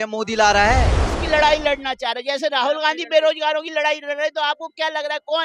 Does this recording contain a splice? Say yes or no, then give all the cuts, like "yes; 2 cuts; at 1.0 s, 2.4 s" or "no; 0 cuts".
yes; 1 cut; at 1.1 s